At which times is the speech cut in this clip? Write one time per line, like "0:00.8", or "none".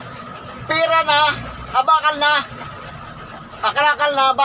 none